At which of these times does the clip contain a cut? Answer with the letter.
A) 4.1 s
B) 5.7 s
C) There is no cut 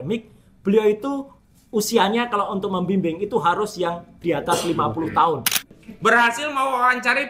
B